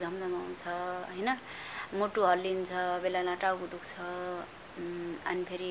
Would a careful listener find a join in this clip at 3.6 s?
no; 0 cuts

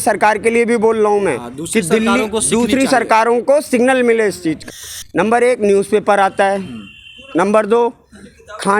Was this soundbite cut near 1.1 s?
no; 1 cut; at 4.7 s

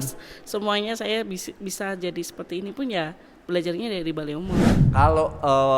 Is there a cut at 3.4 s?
no; 1 cut; at 4.7 s

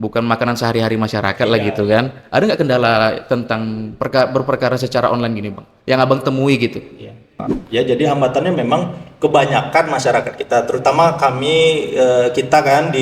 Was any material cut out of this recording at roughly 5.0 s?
no; 1 cut; at 7.5 s

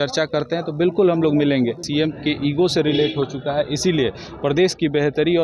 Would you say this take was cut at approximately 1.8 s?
yes; 1 cut; at 1.8 s

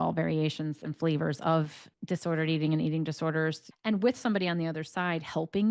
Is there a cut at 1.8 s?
no; 1 cut; at 3.7 s

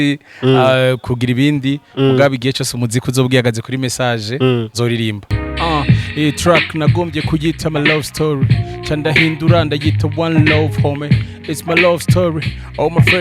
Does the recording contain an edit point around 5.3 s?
yes; 1 cut; at 5.3 s

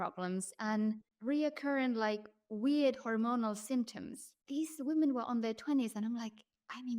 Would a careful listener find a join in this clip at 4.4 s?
yes; 2 cuts; at 1.1 s, 4.4 s

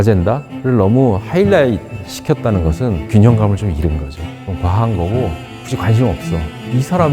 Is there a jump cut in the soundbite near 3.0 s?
yes; 2 cuts; at 3.0 s, 5.6 s

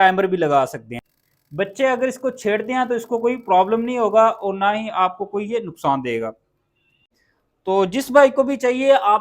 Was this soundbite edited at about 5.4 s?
no; 2 cuts; at 1.7 s, 7.0 s

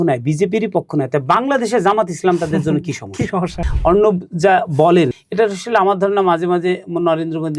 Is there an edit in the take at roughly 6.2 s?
no; 1 cut; at 3.6 s

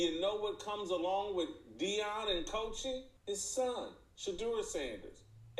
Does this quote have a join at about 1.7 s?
no; 1 cut; at 3.1 s

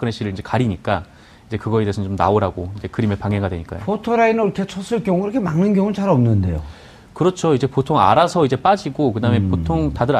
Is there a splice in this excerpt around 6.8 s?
no; 1 cut; at 1.2 s

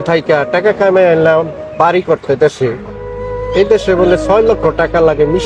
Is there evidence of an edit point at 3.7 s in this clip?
no; 0 cuts

